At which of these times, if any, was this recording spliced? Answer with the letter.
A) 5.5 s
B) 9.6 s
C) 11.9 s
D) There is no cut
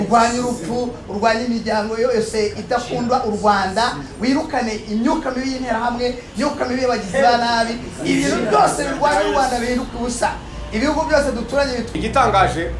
C